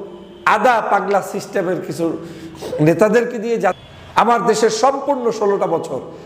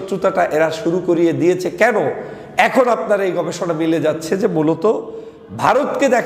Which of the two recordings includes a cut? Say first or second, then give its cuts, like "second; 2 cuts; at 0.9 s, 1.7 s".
first; 1 cut; at 3.8 s